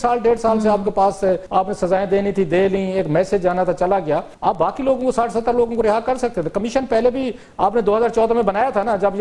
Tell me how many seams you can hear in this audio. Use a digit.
2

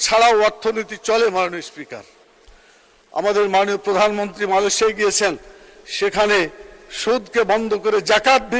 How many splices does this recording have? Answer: 0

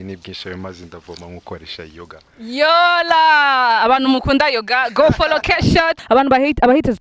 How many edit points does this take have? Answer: 1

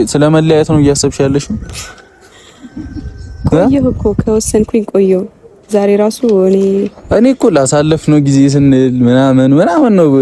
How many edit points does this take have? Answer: 0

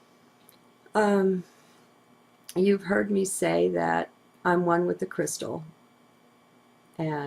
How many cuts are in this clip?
1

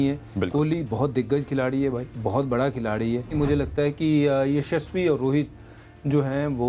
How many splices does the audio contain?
1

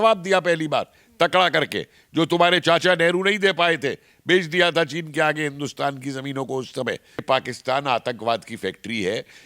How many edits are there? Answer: 1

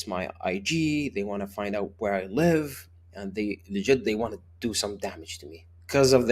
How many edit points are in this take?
0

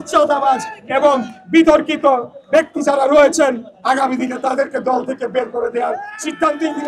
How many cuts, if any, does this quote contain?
0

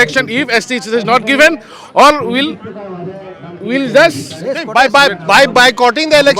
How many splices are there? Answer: 0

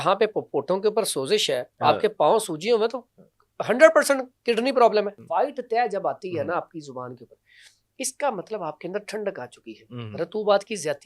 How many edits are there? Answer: 1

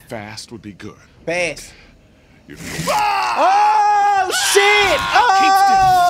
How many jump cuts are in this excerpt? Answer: 1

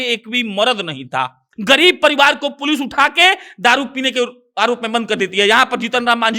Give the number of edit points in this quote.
1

